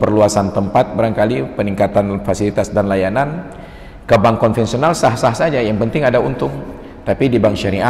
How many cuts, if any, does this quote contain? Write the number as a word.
zero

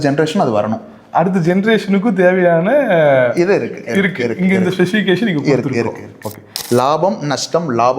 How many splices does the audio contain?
one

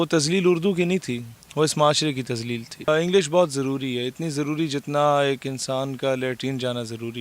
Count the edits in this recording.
one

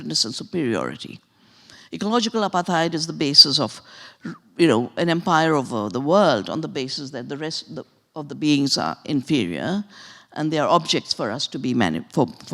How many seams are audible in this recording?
zero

